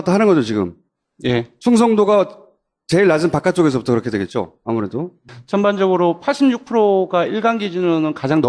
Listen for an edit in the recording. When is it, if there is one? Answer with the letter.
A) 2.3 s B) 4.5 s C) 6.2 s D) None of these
C